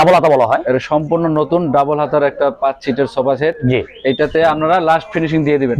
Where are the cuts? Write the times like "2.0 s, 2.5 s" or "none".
none